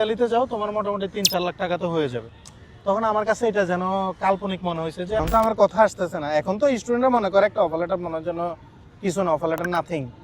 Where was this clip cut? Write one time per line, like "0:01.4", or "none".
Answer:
0:05.2